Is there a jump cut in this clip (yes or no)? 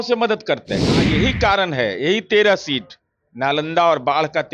yes